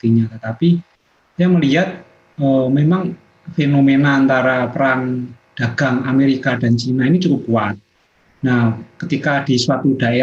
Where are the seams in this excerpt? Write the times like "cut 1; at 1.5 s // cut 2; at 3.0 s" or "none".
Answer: none

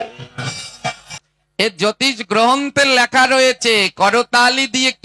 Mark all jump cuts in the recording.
cut 1; at 1.1 s

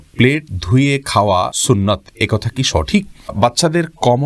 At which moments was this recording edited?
cut 1; at 1.6 s // cut 2; at 3.4 s

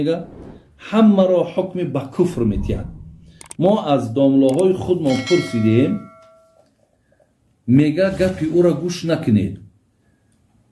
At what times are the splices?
none

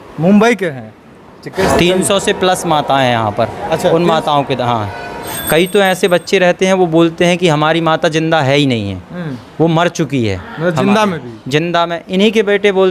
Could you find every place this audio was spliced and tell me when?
cut 1; at 1.6 s // cut 2; at 5.2 s

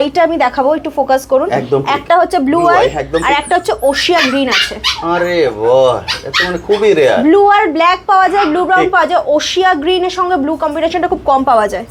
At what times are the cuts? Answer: none

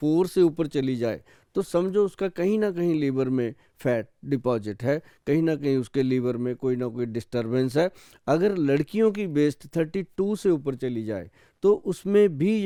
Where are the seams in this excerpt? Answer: none

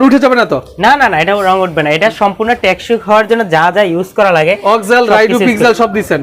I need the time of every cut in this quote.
none

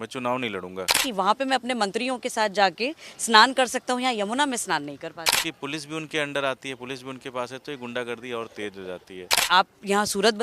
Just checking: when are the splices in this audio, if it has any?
cut 1; at 0.9 s // cut 2; at 5.3 s // cut 3; at 9.4 s

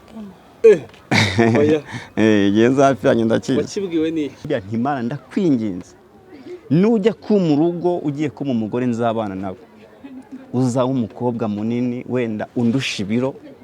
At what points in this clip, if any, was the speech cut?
cut 1; at 4.4 s

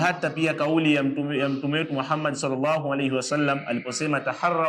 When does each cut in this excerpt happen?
none

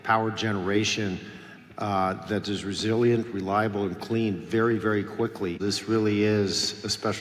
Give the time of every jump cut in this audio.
cut 1; at 5.6 s

